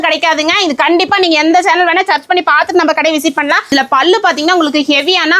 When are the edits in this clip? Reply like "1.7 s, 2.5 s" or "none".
3.7 s